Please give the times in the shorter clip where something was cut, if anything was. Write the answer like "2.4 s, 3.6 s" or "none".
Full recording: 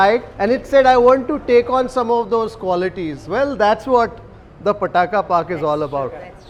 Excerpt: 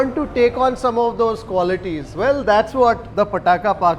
3.1 s

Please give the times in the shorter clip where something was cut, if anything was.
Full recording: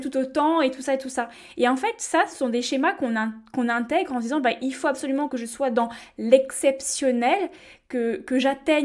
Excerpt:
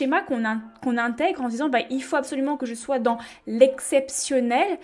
none

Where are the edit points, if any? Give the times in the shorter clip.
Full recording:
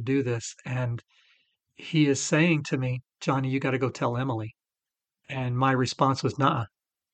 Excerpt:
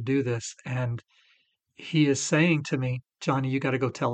none

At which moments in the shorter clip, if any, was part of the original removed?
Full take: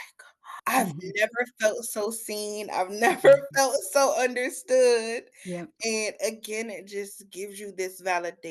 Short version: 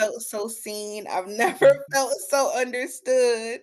none

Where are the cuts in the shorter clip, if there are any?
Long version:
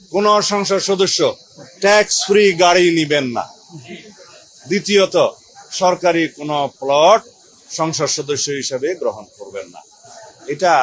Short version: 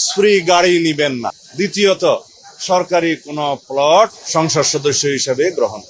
1.4 s, 4.2 s

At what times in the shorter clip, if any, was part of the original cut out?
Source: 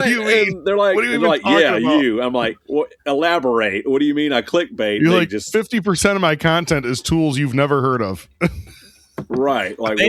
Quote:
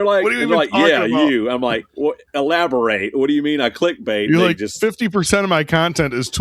none

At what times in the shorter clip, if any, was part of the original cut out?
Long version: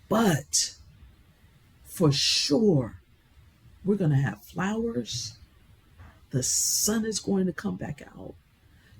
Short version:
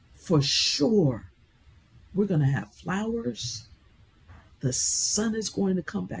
none

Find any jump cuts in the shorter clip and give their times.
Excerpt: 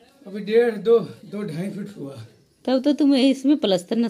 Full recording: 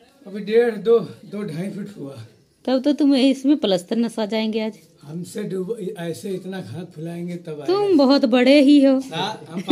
none

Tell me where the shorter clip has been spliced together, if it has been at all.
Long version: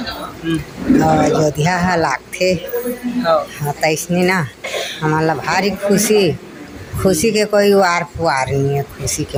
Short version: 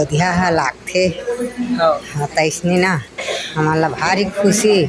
none

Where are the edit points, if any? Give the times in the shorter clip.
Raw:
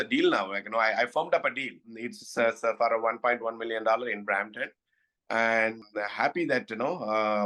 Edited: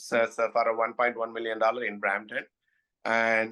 none

